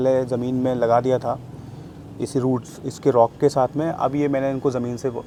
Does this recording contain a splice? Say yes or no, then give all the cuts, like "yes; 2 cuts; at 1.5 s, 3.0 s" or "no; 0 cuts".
no; 0 cuts